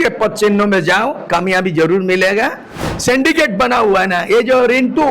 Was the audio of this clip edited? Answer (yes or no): yes